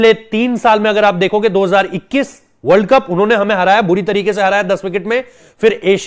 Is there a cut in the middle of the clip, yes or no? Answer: no